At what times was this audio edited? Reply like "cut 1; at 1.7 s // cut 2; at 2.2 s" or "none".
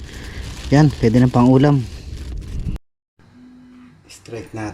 cut 1; at 2.8 s